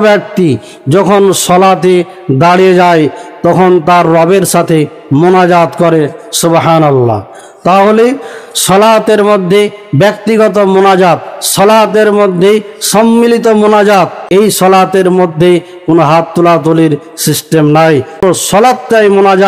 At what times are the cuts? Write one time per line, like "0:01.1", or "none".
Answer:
0:14.2
0:18.2